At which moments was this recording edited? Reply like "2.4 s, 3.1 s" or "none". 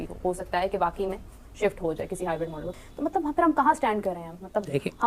2.6 s